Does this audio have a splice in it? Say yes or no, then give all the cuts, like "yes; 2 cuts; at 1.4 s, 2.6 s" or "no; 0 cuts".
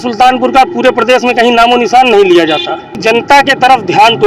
yes; 1 cut; at 3.0 s